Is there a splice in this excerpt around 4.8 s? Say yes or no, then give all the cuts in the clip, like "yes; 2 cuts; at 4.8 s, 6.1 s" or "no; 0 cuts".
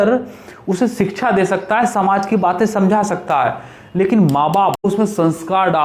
yes; 1 cut; at 4.8 s